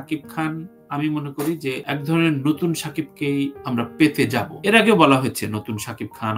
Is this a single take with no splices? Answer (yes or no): yes